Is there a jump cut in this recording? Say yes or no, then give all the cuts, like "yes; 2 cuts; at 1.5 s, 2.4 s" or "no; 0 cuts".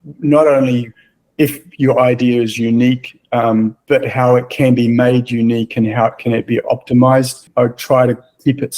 yes; 1 cut; at 7.5 s